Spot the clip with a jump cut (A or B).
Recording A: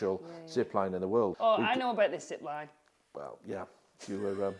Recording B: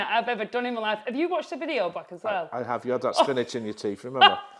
A